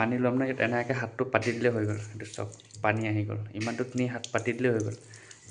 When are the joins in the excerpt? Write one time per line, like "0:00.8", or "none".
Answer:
none